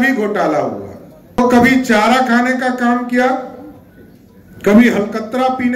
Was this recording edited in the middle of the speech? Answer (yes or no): yes